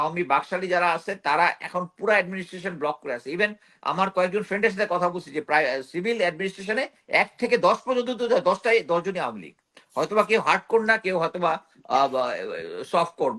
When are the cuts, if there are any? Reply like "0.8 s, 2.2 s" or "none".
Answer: none